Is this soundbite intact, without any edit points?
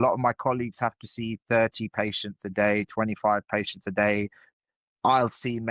no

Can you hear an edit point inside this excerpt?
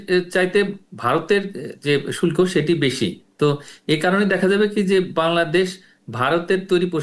no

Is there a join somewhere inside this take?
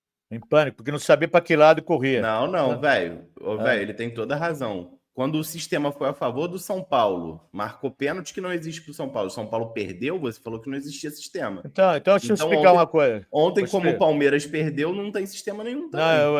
yes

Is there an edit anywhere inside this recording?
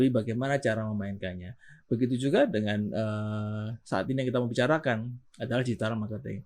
no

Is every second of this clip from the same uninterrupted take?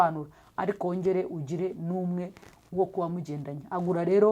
yes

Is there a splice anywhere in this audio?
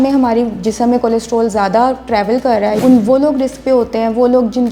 yes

